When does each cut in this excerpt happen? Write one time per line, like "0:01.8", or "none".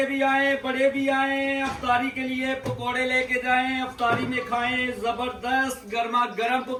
none